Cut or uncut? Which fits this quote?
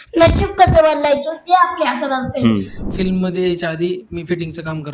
cut